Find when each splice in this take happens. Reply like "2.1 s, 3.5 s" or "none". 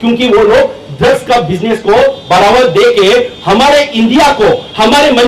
none